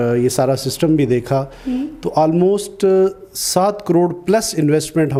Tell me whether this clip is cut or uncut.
uncut